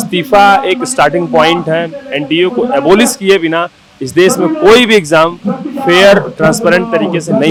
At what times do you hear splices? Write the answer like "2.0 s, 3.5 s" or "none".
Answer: none